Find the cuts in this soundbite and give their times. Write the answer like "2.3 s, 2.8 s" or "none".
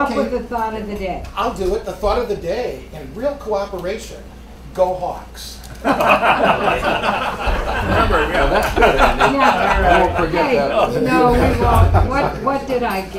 none